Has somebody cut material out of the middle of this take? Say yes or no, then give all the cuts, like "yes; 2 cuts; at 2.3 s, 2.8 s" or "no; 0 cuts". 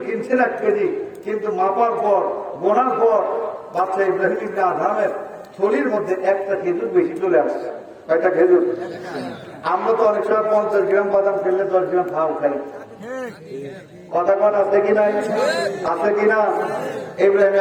no; 0 cuts